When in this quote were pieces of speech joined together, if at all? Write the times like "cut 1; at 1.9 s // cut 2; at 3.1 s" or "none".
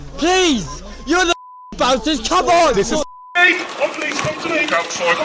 cut 1; at 3.2 s